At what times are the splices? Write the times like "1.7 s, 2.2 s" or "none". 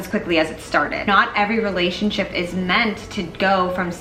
1.1 s